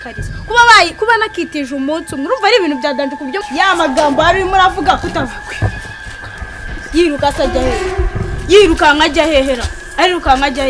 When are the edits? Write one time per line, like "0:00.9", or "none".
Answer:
0:03.4